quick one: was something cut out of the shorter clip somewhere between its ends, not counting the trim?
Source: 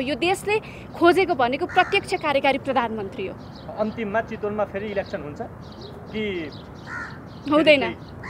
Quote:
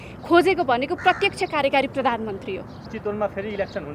yes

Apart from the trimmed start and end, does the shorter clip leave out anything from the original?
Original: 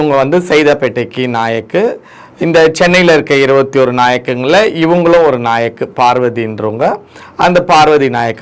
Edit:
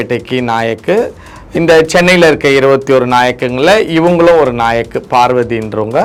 no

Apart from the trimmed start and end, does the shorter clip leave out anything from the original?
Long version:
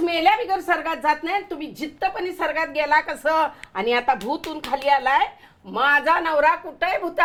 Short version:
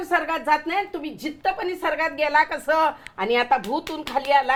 no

